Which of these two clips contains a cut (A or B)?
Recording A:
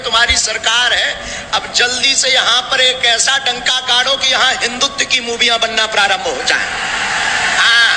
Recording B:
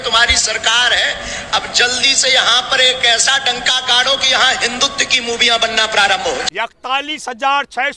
B